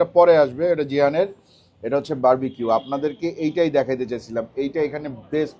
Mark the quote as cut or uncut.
uncut